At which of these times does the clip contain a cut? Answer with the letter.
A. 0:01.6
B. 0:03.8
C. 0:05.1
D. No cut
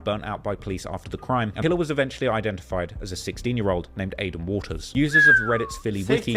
A